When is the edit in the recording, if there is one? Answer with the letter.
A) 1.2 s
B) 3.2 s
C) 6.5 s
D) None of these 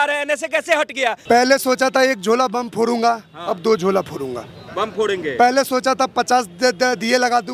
A